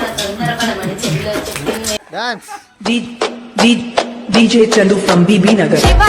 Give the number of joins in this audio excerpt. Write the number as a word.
one